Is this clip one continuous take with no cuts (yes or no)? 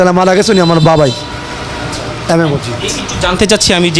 yes